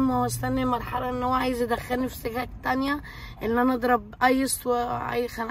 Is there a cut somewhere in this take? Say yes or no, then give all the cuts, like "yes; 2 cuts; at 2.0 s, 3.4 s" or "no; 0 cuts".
no; 0 cuts